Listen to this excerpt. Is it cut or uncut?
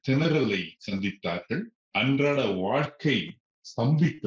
cut